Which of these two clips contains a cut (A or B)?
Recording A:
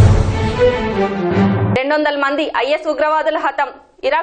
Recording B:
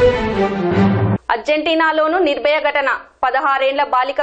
B